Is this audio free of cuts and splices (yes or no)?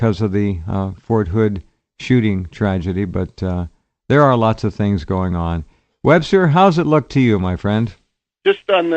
no